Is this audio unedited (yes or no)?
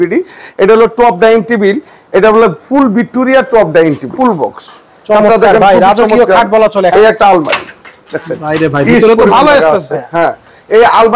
no